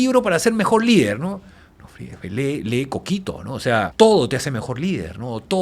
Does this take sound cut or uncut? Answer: cut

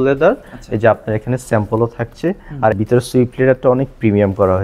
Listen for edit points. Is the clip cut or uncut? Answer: cut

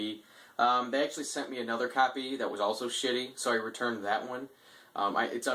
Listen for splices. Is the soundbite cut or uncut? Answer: uncut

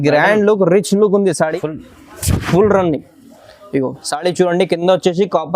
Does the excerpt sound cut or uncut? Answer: cut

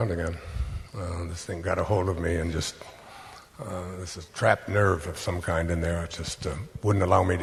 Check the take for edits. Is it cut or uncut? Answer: uncut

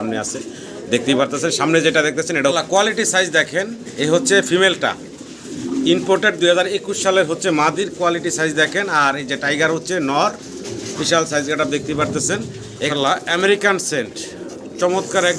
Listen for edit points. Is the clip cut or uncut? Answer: cut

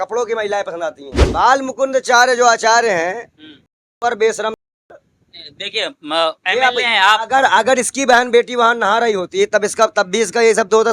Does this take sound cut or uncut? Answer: cut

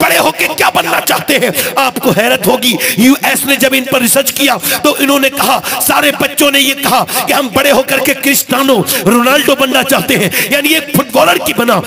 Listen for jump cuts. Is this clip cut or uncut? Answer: uncut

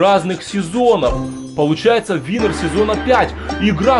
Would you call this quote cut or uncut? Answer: uncut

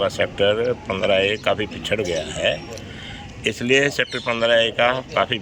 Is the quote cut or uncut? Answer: uncut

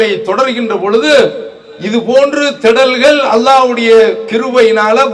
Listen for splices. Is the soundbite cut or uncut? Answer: uncut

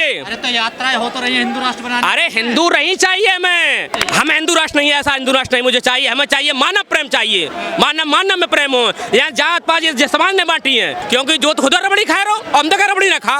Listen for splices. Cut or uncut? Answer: cut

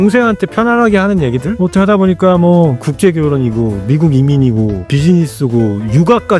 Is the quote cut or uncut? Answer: cut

